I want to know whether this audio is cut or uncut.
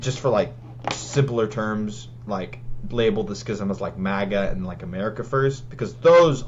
uncut